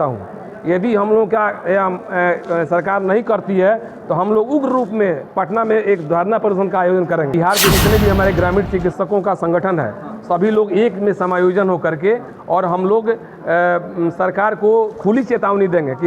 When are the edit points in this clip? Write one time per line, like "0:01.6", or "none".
0:07.3